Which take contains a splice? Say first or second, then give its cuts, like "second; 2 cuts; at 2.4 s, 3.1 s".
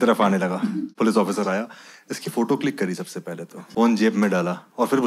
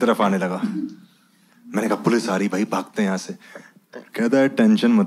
first; 2 cuts; at 0.9 s, 3.5 s